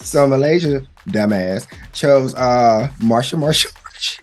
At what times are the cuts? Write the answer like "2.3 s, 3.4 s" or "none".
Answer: none